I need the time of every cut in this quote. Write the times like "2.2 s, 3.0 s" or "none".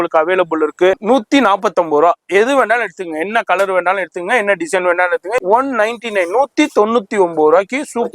1.0 s, 5.4 s